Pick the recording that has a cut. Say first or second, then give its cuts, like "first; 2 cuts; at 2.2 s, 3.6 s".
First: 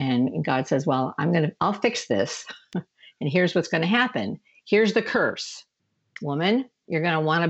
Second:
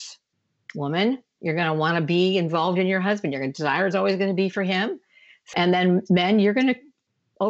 second; 1 cut; at 5.5 s